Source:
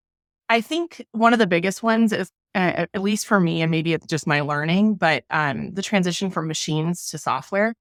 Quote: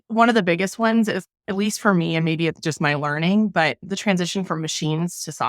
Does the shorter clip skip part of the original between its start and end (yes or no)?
yes